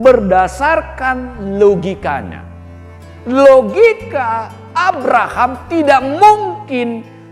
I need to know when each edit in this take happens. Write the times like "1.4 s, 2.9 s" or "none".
none